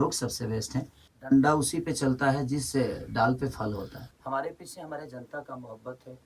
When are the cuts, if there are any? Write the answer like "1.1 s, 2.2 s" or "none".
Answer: 1.0 s, 4.1 s